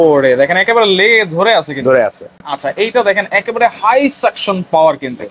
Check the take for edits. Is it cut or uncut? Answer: uncut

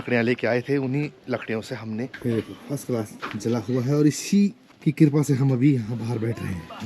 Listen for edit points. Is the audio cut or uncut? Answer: cut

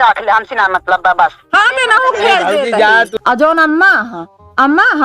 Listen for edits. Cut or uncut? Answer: cut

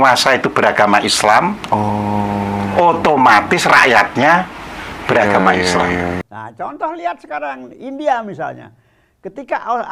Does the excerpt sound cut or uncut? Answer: cut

